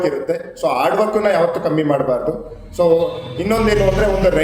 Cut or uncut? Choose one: uncut